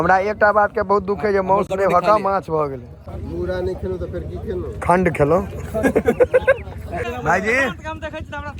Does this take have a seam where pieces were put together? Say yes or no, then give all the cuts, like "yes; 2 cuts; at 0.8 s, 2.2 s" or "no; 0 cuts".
yes; 2 cuts; at 3.0 s, 6.8 s